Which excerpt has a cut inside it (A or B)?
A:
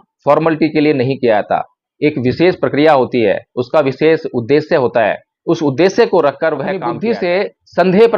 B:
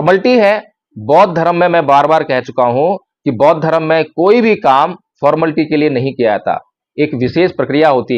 A